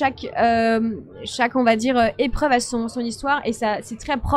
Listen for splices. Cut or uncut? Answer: uncut